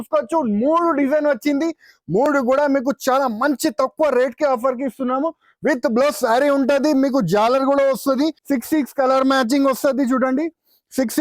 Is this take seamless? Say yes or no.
no